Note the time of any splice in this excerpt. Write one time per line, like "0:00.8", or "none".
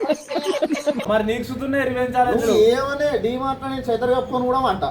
0:01.1